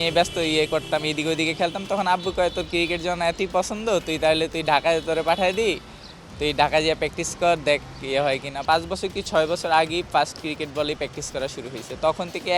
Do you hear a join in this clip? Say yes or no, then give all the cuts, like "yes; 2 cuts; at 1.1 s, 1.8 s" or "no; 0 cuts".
yes; 1 cut; at 8.5 s